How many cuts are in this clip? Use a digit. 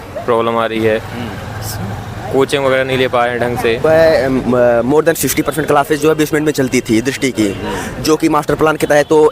1